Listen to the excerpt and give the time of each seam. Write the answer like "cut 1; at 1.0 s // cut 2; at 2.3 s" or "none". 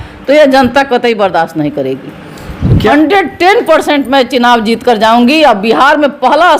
cut 1; at 2.9 s